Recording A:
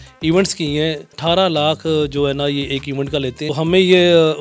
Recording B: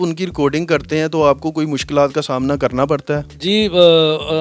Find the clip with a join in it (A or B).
A